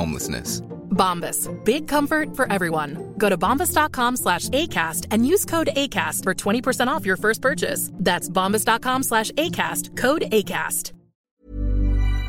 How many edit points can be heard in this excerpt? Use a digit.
1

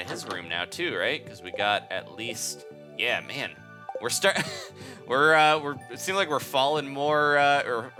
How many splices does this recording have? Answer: 0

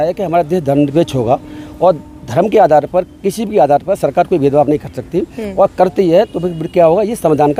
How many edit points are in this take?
0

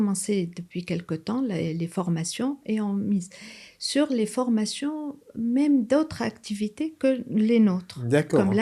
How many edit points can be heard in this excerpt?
0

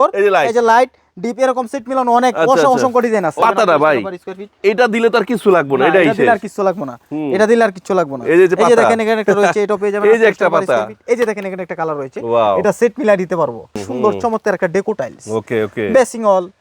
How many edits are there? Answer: 2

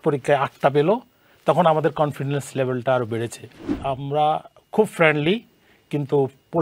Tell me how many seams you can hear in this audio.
1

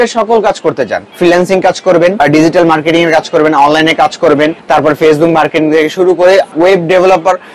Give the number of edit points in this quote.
4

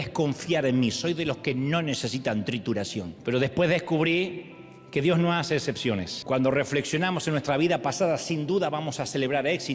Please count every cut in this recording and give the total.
2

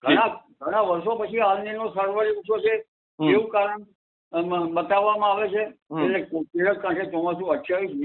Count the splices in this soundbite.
1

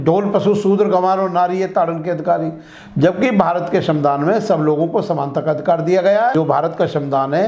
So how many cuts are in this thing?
1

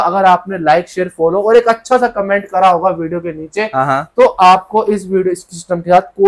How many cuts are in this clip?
0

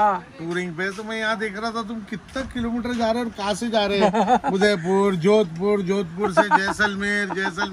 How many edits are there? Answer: 0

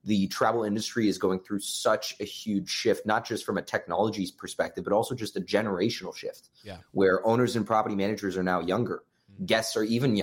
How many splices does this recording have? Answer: 0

